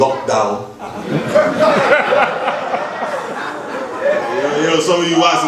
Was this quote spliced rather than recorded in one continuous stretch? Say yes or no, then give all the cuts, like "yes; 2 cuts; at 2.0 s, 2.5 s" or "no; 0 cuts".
no; 0 cuts